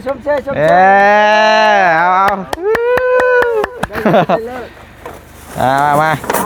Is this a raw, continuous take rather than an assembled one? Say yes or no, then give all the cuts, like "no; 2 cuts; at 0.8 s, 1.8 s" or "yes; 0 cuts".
yes; 0 cuts